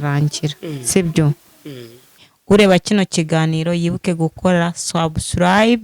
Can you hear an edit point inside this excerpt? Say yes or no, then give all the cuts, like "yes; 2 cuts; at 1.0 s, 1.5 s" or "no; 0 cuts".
yes; 1 cut; at 2.2 s